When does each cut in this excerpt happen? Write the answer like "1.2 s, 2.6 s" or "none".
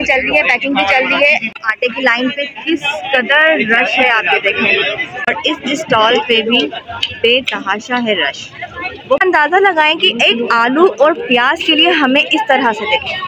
1.6 s, 5.3 s, 9.2 s